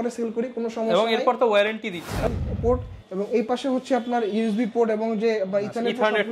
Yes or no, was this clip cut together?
yes